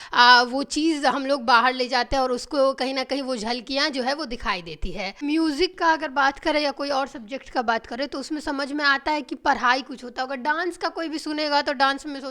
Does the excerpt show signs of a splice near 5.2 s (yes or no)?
yes